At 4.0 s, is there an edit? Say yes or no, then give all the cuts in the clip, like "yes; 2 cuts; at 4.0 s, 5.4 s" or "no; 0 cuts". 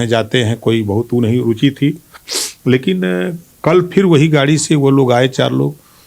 no; 0 cuts